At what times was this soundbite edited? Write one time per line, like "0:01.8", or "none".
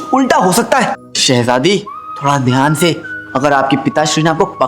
0:01.0